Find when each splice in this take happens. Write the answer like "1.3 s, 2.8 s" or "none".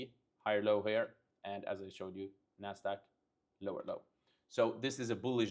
none